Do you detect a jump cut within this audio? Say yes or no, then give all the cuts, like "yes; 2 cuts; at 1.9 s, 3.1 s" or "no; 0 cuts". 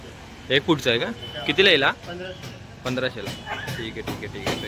no; 0 cuts